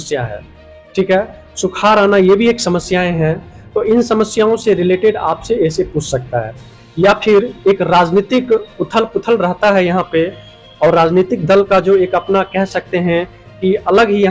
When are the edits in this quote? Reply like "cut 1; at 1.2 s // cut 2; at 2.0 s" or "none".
none